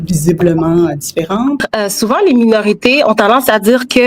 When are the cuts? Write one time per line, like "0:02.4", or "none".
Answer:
0:01.7